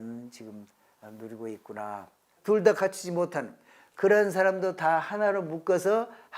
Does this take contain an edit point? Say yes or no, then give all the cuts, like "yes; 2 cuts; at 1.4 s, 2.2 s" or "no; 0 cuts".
yes; 1 cut; at 2.3 s